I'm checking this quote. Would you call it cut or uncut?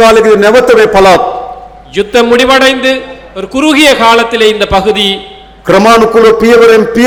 uncut